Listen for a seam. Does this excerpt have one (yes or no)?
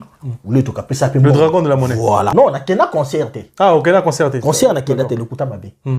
yes